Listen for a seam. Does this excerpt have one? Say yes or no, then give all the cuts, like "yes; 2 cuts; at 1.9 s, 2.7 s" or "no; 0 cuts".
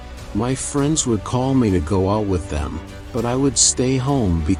no; 0 cuts